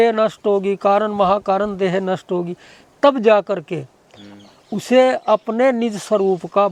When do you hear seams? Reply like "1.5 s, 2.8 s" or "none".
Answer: none